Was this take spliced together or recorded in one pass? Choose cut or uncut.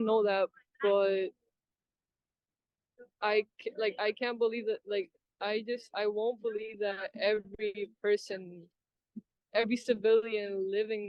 uncut